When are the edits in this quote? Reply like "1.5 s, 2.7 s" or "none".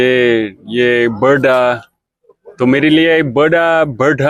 none